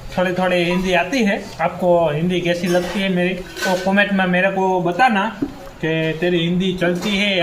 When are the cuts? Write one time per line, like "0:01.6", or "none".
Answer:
0:01.5
0:03.5